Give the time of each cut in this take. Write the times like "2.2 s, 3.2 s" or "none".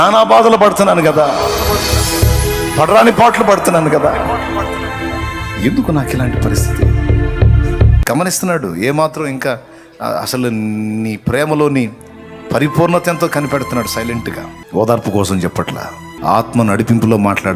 8.0 s, 14.5 s, 16.0 s